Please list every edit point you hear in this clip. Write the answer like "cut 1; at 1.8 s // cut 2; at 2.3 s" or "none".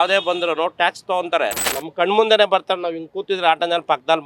cut 1; at 1.8 s